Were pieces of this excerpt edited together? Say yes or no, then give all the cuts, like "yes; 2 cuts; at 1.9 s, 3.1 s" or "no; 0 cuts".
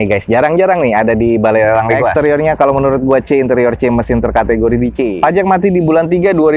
yes; 2 cuts; at 2.1 s, 5.1 s